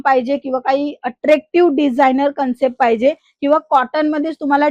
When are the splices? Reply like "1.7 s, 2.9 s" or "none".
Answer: none